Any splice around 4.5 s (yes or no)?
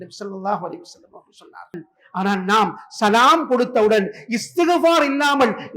no